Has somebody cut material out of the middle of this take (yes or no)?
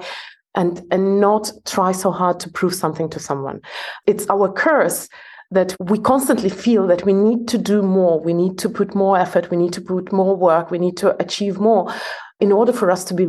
yes